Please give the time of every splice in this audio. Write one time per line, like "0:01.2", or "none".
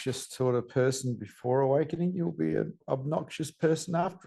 0:02.8